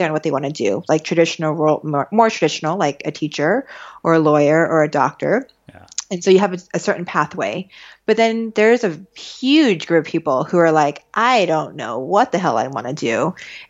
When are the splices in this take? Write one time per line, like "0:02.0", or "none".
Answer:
none